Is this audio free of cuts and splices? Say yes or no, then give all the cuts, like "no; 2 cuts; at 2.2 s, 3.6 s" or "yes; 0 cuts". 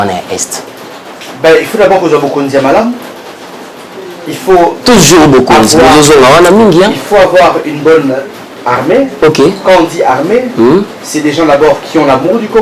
yes; 0 cuts